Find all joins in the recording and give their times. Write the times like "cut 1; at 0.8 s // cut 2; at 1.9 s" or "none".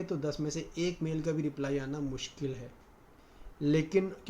cut 1; at 3.1 s